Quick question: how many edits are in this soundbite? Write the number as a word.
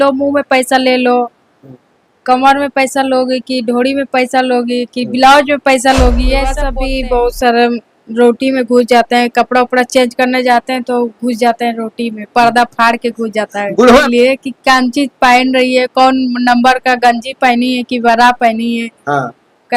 two